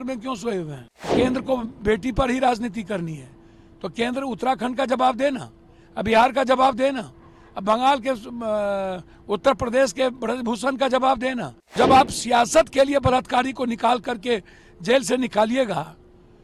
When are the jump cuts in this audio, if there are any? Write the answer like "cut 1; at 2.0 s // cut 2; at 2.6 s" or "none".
cut 1; at 1.1 s // cut 2; at 11.8 s

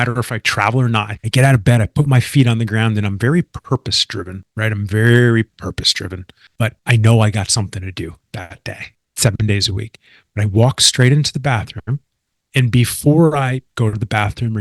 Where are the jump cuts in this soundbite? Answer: cut 1; at 1.2 s

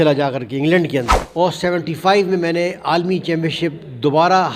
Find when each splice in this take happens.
cut 1; at 1.2 s

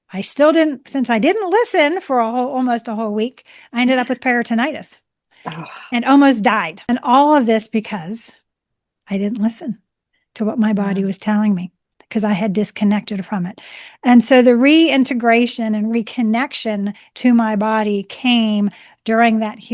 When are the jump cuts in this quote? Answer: cut 1; at 6.7 s

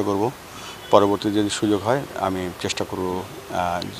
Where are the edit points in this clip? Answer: none

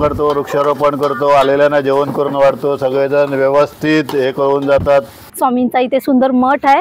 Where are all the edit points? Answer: cut 1; at 5.2 s

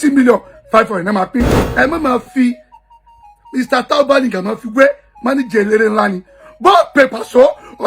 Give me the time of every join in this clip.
cut 1; at 1.6 s

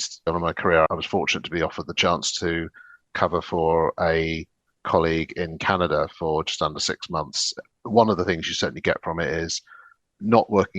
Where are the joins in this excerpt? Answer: cut 1; at 7.4 s

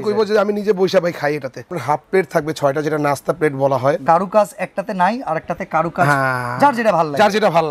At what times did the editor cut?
cut 1; at 1.7 s // cut 2; at 4.0 s

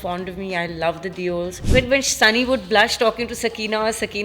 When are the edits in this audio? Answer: cut 1; at 1.6 s

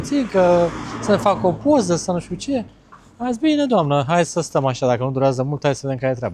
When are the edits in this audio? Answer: none

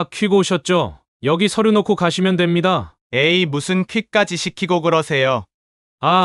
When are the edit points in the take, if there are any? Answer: cut 1; at 1.0 s // cut 2; at 2.9 s

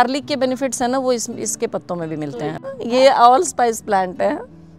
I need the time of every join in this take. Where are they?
cut 1; at 2.7 s

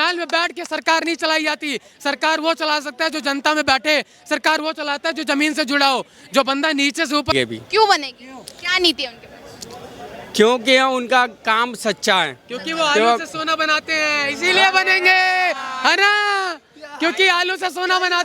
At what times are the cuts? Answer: cut 1; at 7.3 s

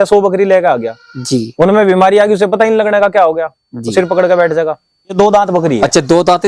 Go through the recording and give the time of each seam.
cut 1; at 5.1 s

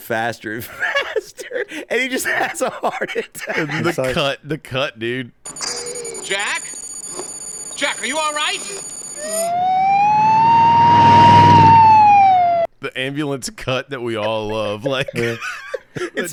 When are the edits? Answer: none

